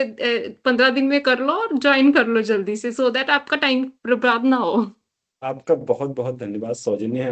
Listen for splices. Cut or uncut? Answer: uncut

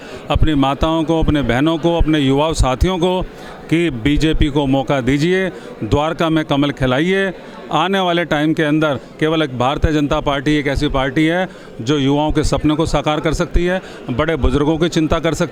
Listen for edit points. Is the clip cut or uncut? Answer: uncut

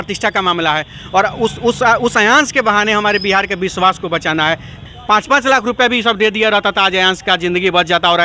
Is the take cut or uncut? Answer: cut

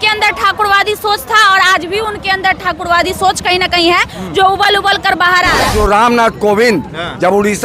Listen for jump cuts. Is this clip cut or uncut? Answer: cut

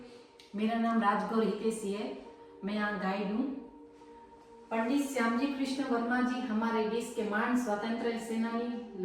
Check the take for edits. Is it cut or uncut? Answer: uncut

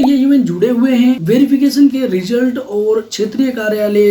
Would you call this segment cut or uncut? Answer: cut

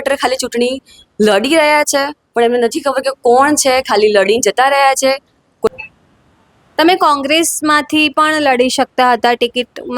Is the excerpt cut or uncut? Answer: cut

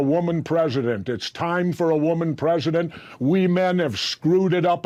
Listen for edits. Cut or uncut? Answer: uncut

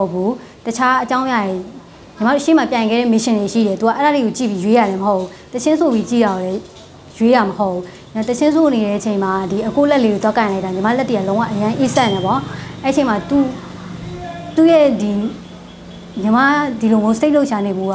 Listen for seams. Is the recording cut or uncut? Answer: uncut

